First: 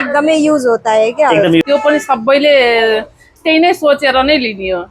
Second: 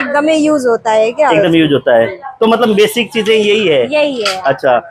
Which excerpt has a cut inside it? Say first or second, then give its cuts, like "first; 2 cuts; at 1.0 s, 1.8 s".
first; 1 cut; at 1.6 s